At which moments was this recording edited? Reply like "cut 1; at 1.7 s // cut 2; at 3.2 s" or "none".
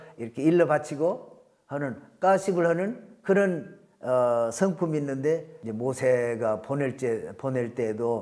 cut 1; at 5.6 s